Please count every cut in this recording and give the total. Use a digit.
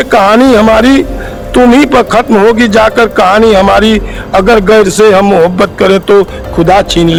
0